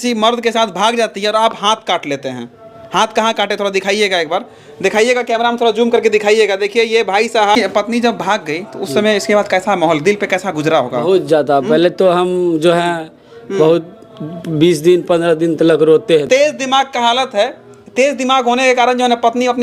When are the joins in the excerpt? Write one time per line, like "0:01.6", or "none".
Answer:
0:07.6
0:16.2